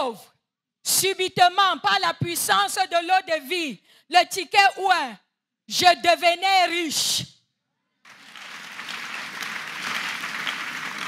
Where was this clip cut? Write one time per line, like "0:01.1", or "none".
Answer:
none